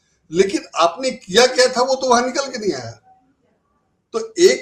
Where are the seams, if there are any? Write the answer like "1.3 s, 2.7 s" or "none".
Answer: none